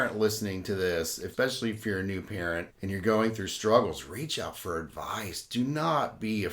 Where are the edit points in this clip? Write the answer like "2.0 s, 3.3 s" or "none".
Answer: 1.3 s, 2.7 s